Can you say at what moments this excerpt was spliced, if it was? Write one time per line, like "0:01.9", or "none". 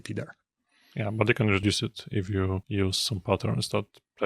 0:01.6
0:02.6

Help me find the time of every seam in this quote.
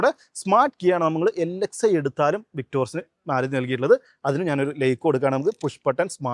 none

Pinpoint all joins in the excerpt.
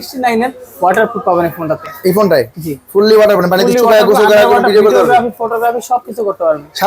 none

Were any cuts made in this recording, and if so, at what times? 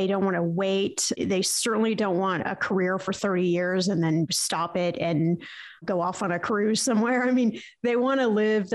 none

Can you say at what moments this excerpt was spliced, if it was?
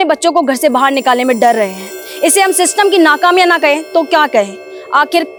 none

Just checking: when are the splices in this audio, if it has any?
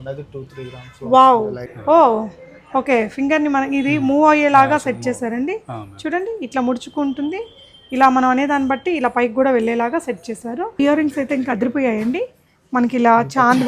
0:01.6
0:10.8

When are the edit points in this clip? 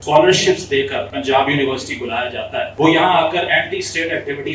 0:01.1
0:02.7

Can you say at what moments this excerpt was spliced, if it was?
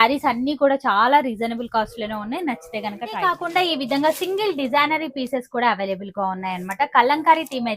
none

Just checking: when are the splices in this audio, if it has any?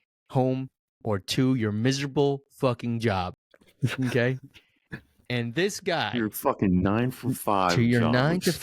none

